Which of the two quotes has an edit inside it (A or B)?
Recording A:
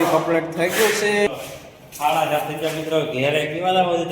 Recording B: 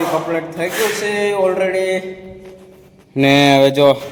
A